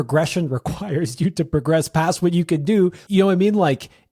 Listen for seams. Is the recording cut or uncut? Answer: cut